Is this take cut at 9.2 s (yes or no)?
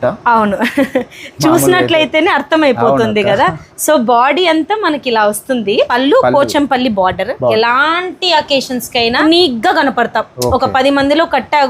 yes